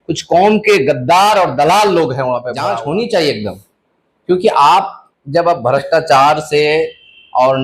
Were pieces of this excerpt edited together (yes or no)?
yes